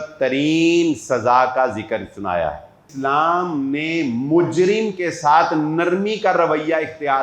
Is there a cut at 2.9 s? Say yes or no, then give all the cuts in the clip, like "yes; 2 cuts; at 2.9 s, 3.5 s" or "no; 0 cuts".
yes; 1 cut; at 2.9 s